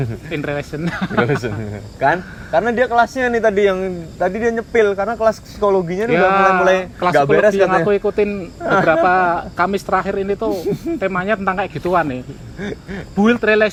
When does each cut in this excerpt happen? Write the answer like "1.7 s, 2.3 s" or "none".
none